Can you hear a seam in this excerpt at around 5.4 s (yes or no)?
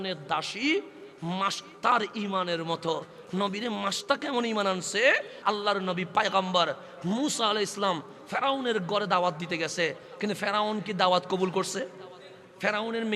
yes